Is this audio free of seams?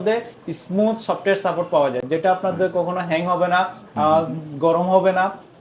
yes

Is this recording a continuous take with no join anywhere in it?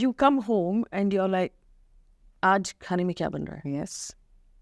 yes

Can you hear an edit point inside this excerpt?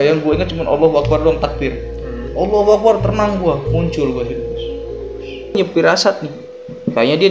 yes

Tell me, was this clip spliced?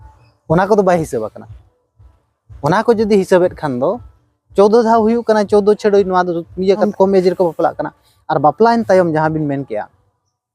yes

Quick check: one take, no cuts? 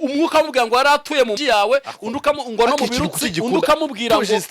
no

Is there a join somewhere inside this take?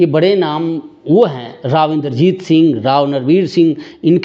no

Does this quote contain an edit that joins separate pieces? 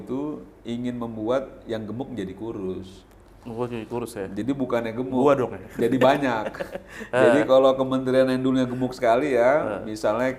no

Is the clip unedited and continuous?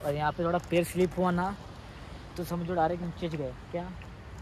yes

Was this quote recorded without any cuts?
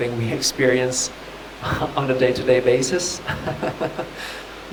yes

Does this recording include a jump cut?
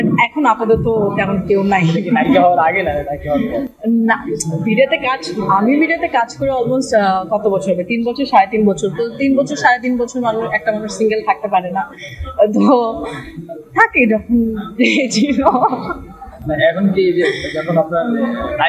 no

